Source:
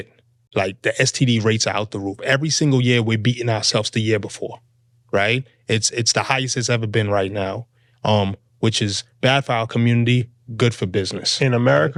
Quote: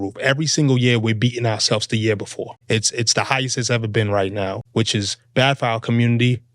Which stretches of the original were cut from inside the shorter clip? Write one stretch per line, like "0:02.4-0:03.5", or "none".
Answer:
0:04.6-0:05.5
0:07.6-0:08.5